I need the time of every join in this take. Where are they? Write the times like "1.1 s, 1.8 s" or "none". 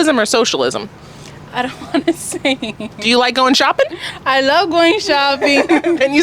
none